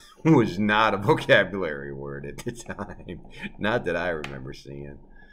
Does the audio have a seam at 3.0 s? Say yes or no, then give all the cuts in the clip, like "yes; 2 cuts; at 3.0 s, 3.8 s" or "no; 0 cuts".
no; 0 cuts